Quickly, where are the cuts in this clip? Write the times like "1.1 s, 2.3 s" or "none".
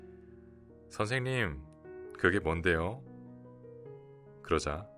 0.9 s